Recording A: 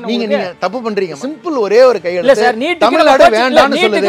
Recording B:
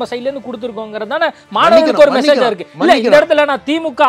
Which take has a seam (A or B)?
A